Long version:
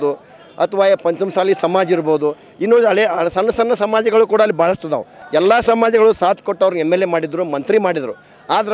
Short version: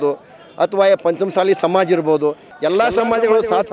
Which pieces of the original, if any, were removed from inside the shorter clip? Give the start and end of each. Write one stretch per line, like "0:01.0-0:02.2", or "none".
0:02.5-0:05.2